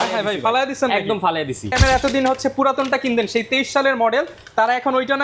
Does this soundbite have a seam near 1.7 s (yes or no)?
yes